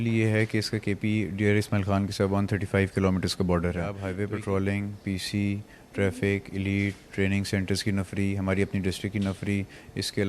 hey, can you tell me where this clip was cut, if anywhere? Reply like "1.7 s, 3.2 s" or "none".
4.0 s